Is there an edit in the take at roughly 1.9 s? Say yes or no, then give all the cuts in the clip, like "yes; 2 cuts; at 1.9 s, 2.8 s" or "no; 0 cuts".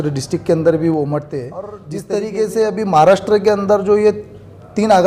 yes; 1 cut; at 1.9 s